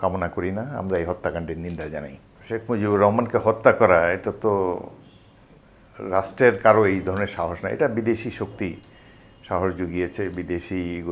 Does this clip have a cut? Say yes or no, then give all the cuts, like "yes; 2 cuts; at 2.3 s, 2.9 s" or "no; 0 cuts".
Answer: no; 0 cuts